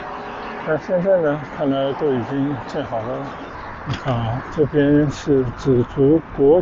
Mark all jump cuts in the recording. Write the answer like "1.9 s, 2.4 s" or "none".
3.6 s